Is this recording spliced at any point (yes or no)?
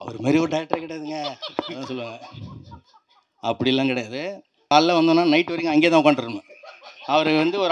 yes